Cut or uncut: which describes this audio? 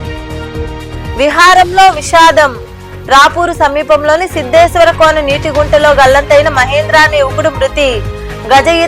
cut